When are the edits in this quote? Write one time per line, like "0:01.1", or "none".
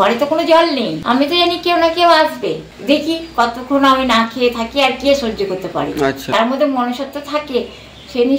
0:00.9
0:02.6
0:06.3